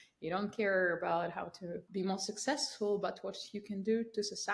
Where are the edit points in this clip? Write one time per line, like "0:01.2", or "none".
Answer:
0:01.8